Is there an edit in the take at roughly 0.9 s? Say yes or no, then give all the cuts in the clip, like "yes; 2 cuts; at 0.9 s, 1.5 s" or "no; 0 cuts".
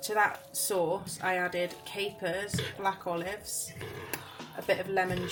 no; 0 cuts